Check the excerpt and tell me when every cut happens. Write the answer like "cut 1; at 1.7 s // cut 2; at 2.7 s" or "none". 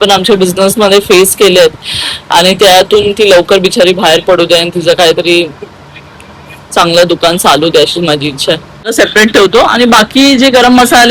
cut 1; at 8.9 s